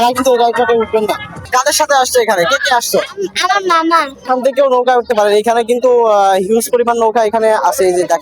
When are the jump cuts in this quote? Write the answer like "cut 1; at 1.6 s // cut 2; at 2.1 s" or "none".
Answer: cut 1; at 1.4 s // cut 2; at 4.2 s